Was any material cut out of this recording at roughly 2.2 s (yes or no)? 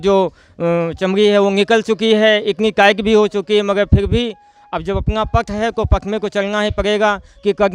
no